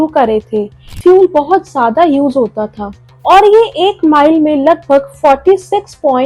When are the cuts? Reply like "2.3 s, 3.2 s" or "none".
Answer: 0.9 s

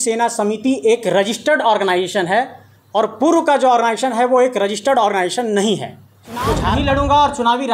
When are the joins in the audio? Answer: 6.6 s

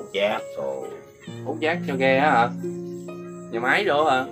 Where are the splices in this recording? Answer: none

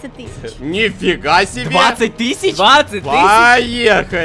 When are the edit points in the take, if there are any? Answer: none

